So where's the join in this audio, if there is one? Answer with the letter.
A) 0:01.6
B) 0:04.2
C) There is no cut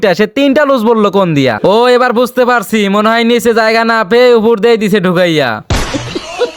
A